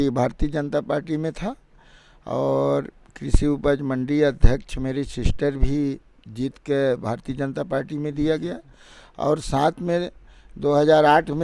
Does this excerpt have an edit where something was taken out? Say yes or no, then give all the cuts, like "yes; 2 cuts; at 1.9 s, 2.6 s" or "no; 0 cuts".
no; 0 cuts